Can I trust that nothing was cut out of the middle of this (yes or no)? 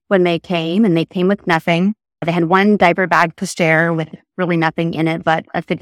no